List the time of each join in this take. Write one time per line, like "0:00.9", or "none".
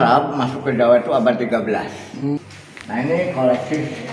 0:02.4